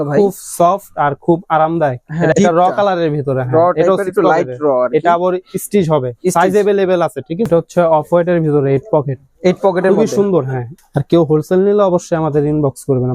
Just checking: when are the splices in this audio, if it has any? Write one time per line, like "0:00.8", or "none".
0:02.3
0:07.5
0:10.6